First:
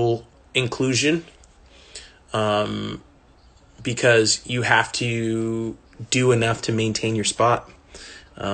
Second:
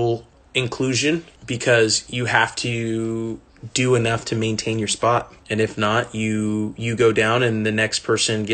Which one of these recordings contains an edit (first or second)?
second